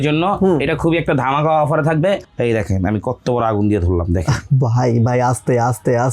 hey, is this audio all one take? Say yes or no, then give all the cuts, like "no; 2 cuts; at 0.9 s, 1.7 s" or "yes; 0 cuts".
no; 1 cut; at 2.2 s